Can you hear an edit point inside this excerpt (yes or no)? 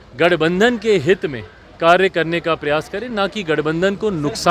no